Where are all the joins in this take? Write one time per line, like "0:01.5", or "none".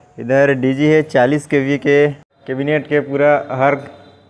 0:02.2